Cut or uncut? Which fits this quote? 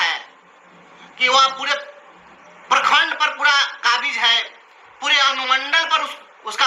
uncut